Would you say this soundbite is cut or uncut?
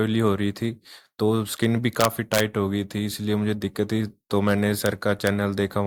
uncut